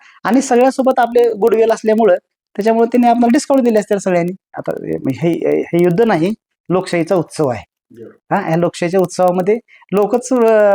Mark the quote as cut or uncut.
cut